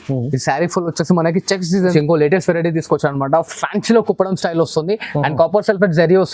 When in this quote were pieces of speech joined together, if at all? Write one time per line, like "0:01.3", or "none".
0:01.9